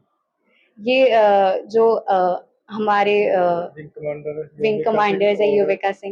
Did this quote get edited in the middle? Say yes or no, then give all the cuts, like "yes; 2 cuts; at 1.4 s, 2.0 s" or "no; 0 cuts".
no; 0 cuts